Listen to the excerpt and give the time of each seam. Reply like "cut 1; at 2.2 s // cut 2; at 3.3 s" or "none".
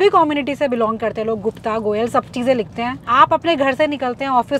cut 1; at 3.0 s